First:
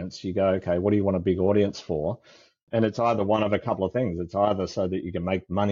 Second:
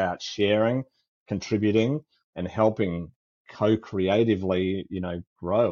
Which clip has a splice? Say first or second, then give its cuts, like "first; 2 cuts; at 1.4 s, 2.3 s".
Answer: first; 1 cut; at 2.6 s